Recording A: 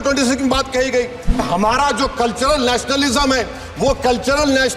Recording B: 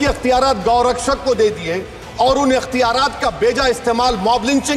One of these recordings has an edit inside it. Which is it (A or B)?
A